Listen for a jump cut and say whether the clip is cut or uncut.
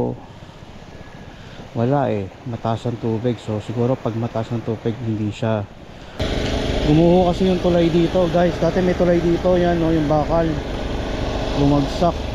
cut